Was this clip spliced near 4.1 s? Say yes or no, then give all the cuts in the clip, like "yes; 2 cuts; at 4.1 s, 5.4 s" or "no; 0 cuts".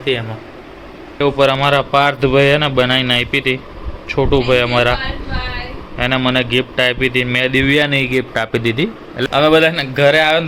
no; 2 cuts; at 1.2 s, 9.2 s